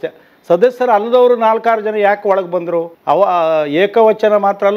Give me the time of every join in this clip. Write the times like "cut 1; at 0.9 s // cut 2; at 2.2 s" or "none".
cut 1; at 2.9 s